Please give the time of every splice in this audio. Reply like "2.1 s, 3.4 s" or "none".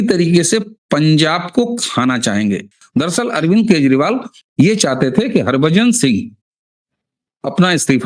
2.7 s